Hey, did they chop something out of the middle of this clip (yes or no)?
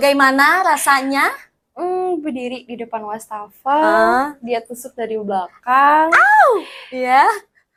no